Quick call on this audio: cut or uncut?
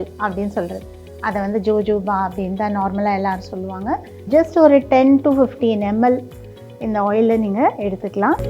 cut